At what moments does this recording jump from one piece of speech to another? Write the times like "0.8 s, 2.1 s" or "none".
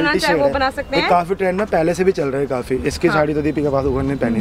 none

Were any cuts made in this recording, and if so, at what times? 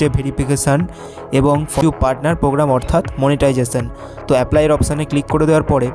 1.8 s

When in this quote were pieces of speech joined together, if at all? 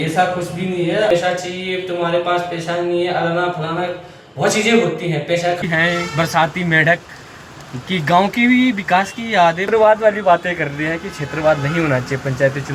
1.1 s, 5.6 s, 9.6 s

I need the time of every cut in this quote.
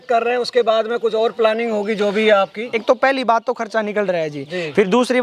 2.6 s

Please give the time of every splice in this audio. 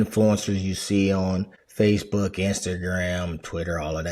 1.6 s

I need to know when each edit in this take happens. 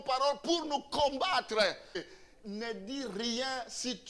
2.0 s

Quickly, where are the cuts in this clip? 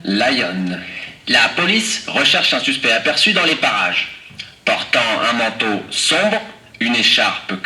6.6 s

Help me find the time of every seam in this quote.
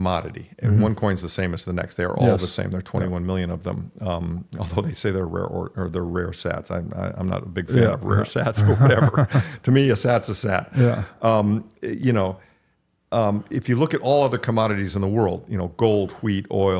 1.3 s

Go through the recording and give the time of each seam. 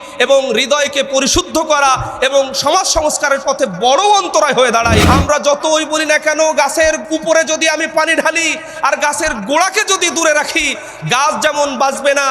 5.0 s, 7.0 s

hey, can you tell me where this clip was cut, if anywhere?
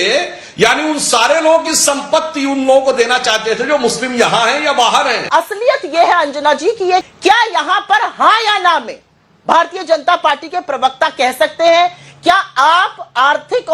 7.0 s

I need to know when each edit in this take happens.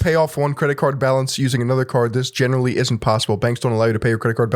none

